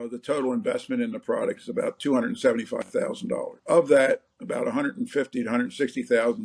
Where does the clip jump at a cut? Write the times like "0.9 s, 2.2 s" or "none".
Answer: 3.6 s